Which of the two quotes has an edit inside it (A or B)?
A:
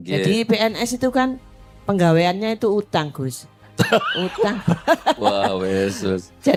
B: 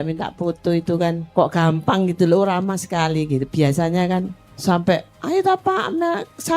B